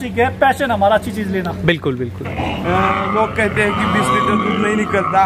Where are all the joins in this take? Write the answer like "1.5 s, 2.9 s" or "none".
2.3 s